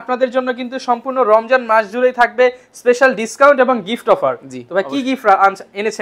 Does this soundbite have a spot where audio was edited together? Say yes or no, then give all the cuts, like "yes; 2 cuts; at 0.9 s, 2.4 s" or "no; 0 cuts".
no; 0 cuts